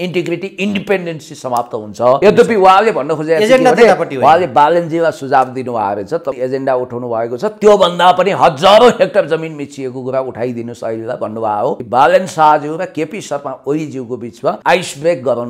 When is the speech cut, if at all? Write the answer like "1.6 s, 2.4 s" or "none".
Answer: 2.2 s, 6.4 s, 11.8 s, 14.6 s